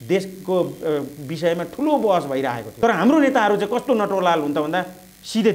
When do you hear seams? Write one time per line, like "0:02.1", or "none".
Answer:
0:02.6